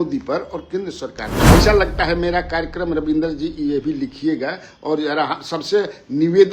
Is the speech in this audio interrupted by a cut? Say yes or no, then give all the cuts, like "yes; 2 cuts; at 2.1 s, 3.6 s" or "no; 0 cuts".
yes; 1 cut; at 1.5 s